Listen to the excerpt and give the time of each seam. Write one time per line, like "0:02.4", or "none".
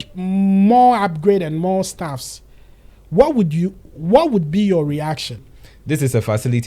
0:05.5